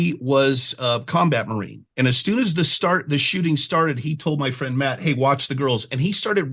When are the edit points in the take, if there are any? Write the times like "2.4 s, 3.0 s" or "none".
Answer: none